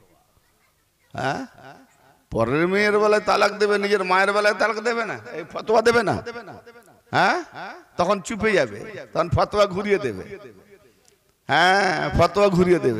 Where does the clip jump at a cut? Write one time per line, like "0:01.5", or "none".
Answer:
none